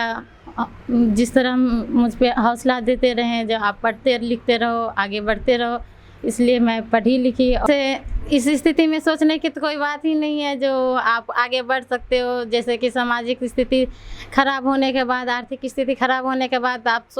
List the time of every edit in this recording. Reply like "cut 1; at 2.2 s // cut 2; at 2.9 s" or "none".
cut 1; at 7.6 s